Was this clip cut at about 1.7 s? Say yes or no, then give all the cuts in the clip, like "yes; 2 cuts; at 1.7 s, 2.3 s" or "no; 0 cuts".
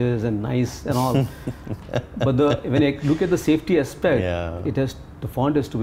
no; 0 cuts